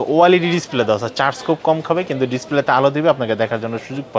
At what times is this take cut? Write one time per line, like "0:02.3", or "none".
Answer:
none